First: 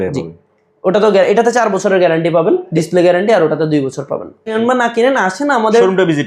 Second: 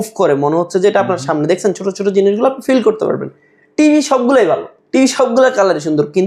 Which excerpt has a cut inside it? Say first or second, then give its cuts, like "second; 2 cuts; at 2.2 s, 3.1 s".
first; 1 cut; at 4.5 s